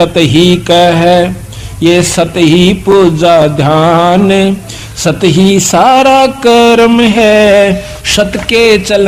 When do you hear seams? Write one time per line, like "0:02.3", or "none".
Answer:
none